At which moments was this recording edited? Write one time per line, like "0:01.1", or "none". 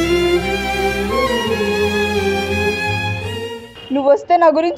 0:03.6